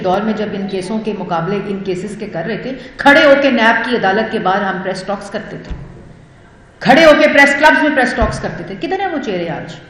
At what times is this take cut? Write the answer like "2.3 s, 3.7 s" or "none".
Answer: none